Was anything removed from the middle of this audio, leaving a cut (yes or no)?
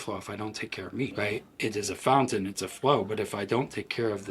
yes